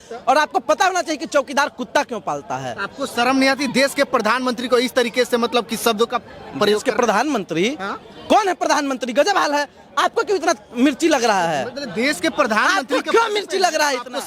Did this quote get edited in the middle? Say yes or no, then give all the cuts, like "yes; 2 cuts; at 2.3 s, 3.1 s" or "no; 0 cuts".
no; 0 cuts